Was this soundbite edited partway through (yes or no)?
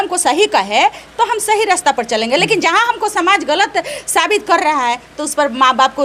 no